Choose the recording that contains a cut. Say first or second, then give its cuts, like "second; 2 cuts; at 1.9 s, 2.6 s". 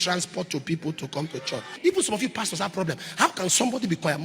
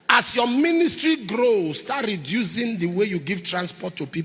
first; 1 cut; at 1.7 s